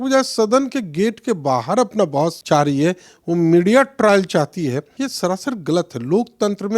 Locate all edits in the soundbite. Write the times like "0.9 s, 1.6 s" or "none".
2.4 s, 4.9 s